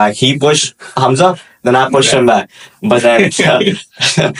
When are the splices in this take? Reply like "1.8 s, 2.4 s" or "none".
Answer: none